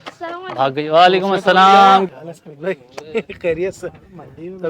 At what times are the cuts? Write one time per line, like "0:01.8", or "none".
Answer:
0:02.1

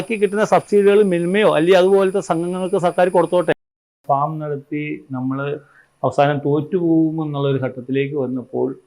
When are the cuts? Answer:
0:03.8

